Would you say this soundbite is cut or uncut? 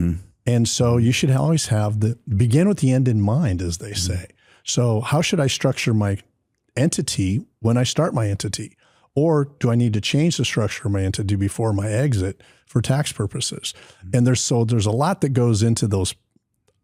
uncut